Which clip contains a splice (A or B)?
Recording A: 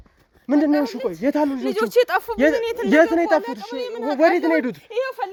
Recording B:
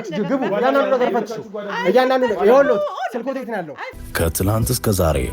B